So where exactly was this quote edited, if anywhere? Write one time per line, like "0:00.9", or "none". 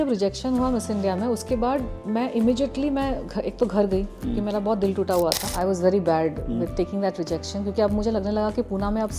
0:05.5